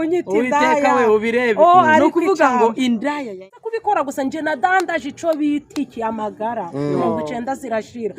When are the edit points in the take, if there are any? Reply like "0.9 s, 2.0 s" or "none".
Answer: 3.3 s